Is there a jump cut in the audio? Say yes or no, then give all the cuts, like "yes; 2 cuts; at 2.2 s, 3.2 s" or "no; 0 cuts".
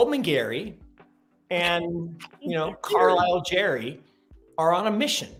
no; 0 cuts